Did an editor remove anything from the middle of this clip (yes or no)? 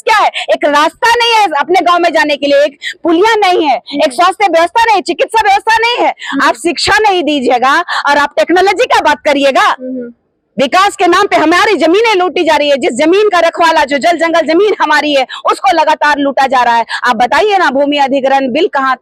no